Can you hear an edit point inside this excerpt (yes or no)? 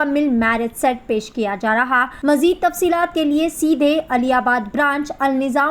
yes